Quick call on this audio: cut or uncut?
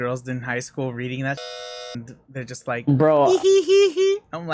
uncut